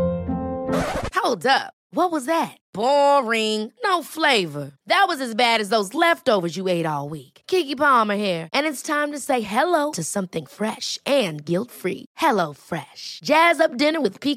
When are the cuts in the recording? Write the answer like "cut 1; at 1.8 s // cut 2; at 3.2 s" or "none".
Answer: none